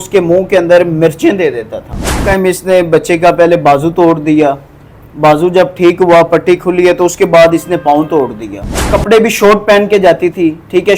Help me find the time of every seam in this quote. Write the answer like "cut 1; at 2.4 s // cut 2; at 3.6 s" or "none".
cut 1; at 2.2 s // cut 2; at 8.9 s